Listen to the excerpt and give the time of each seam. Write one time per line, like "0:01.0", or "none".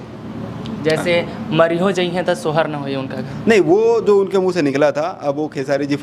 none